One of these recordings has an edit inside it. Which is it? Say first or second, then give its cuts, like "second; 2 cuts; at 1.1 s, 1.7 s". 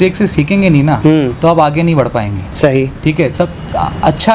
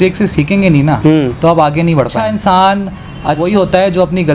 second; 2 cuts; at 2.2 s, 3.4 s